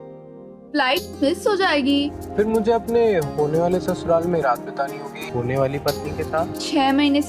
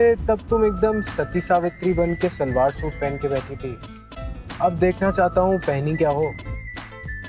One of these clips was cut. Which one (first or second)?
first